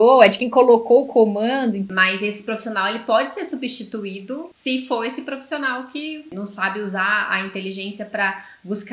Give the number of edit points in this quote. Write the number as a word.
three